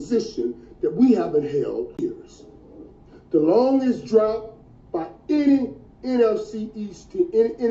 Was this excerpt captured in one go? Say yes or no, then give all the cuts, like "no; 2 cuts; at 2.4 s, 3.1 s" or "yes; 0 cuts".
no; 1 cut; at 2.1 s